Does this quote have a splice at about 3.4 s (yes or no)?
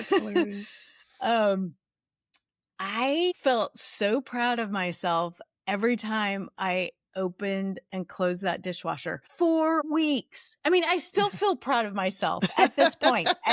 yes